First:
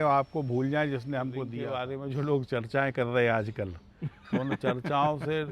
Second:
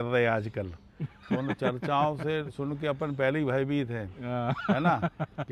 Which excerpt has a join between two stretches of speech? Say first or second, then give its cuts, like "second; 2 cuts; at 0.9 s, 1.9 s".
first; 1 cut; at 1.7 s